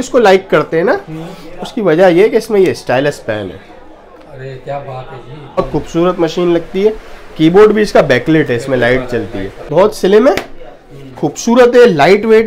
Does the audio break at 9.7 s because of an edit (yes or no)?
yes